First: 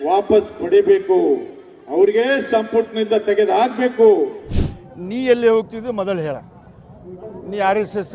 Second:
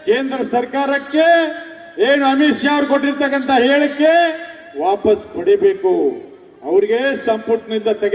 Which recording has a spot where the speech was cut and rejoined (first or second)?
first